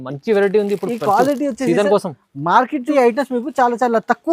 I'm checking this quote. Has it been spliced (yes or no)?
yes